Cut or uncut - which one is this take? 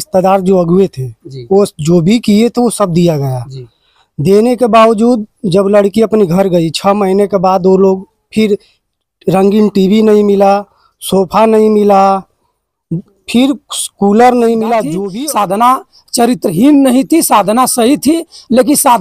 cut